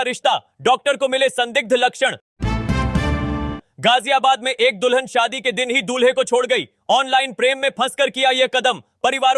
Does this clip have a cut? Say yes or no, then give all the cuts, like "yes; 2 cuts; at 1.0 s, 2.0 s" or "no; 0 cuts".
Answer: no; 0 cuts